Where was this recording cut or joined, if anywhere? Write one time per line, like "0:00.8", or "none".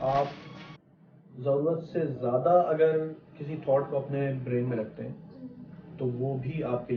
none